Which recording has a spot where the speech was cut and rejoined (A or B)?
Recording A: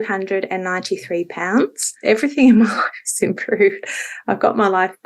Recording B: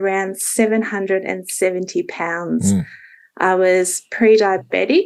A